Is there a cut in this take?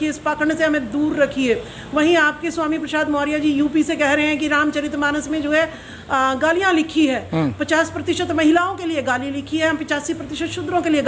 no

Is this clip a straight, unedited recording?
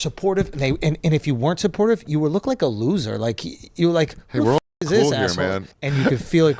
no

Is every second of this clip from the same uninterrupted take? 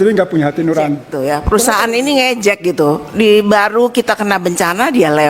no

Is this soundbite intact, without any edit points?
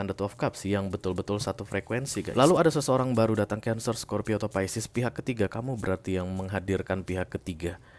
no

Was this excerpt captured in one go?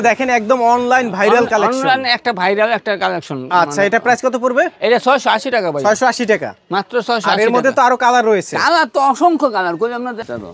yes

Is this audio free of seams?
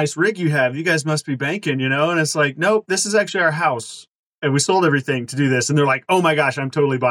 yes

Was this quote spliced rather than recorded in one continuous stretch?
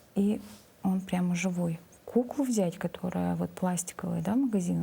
yes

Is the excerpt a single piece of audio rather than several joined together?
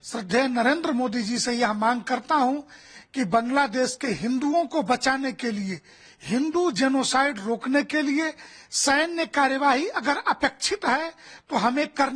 yes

